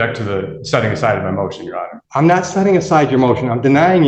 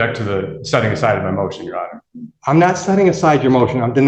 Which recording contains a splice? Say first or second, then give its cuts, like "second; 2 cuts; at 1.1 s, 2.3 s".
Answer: first; 1 cut; at 1.9 s